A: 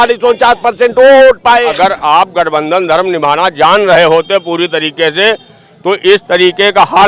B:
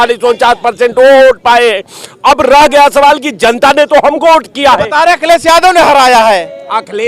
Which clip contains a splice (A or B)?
A